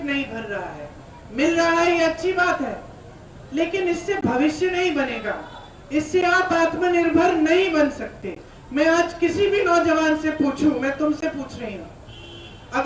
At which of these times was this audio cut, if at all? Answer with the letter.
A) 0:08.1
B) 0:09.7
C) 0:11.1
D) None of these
D